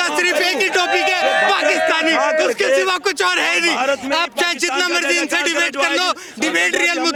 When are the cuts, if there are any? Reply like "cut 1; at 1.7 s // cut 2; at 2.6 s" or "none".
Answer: none